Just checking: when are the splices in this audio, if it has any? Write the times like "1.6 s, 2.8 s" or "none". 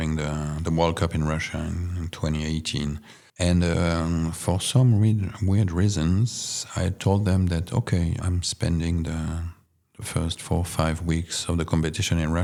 none